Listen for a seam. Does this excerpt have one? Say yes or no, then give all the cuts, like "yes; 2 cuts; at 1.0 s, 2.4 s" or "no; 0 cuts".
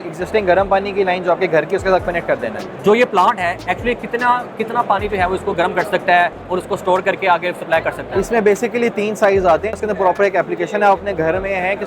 yes; 1 cut; at 9.7 s